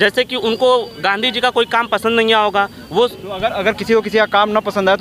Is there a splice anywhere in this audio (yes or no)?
no